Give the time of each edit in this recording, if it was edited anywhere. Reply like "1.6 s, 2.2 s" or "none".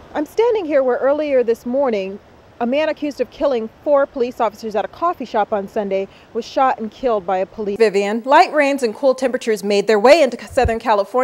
7.7 s